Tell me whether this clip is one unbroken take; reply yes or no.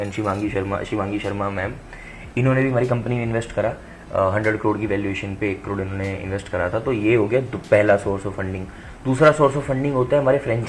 yes